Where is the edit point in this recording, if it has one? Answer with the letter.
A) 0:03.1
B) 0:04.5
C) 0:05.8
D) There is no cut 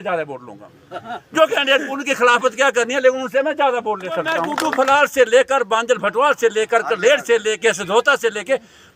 B